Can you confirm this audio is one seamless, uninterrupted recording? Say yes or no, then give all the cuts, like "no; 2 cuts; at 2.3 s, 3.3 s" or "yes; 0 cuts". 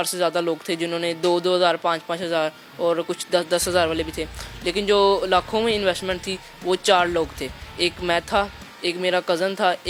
yes; 0 cuts